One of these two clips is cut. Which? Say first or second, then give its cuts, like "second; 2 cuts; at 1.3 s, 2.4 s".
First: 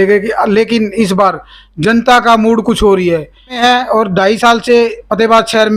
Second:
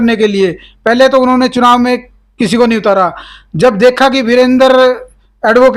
first; 1 cut; at 3.6 s